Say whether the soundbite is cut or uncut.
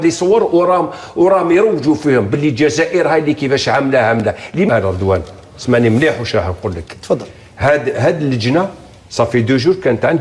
cut